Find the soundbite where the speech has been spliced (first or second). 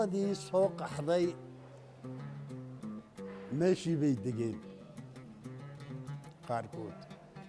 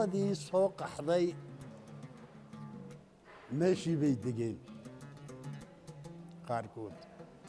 first